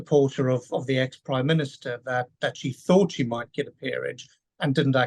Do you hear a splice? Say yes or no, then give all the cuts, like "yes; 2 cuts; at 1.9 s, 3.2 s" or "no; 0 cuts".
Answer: no; 0 cuts